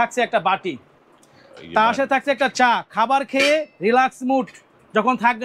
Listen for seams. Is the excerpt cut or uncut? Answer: uncut